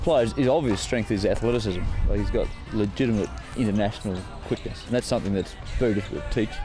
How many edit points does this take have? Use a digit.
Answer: 4